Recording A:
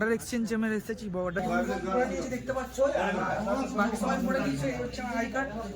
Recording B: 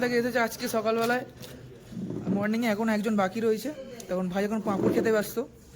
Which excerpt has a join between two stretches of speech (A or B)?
A